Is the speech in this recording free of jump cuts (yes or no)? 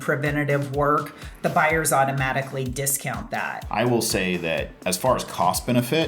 no